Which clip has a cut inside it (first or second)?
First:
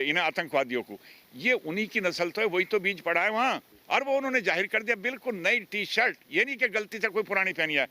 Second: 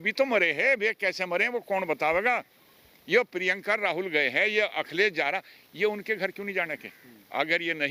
first